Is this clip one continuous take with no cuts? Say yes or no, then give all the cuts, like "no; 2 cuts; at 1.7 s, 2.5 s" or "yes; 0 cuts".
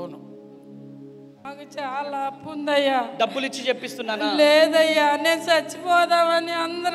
no; 1 cut; at 1.4 s